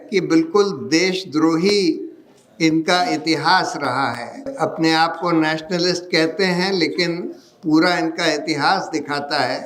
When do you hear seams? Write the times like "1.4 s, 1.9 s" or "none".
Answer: 4.5 s